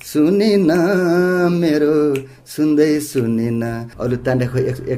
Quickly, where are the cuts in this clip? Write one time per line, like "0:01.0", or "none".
0:03.9

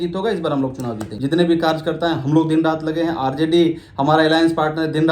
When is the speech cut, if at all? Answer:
0:01.1

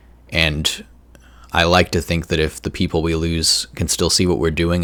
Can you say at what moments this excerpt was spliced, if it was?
none

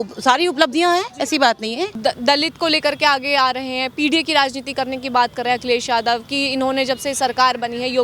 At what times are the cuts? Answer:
0:01.9

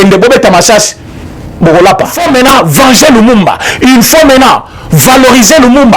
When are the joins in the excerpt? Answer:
0:02.2

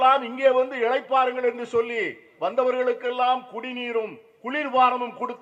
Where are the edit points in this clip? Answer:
none

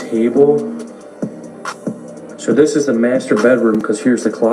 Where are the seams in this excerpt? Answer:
0:00.9
0:02.1

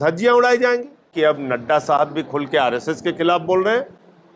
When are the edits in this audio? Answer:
0:01.1

